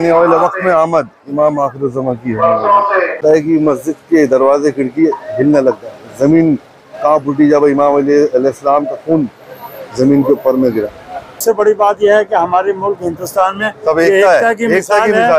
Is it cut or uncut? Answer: cut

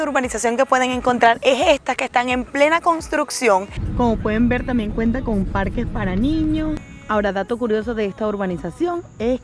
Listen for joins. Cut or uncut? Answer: cut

